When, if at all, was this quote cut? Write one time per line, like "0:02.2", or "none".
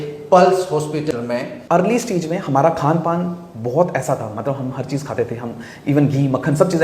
0:01.1